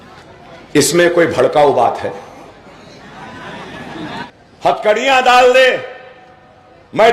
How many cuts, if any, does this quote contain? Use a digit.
1